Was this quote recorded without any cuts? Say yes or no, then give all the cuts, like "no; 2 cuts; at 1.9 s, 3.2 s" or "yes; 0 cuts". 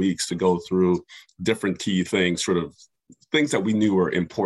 yes; 0 cuts